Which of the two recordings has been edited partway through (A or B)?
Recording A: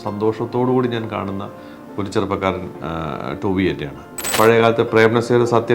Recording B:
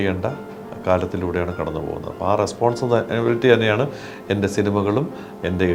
A